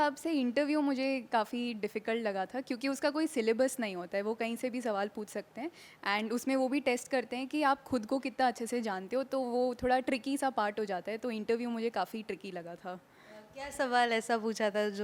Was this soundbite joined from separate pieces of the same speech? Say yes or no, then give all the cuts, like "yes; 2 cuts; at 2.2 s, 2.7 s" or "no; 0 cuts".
no; 0 cuts